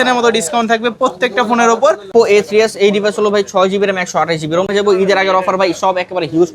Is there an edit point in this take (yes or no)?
yes